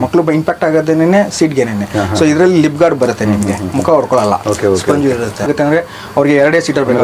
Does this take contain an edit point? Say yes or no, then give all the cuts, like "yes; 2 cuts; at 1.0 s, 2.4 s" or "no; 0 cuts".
yes; 1 cut; at 5.5 s